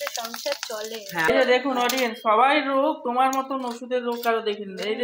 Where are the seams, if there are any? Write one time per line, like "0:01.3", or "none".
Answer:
0:01.3